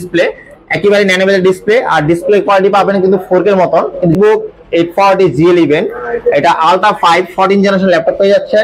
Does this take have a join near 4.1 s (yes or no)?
yes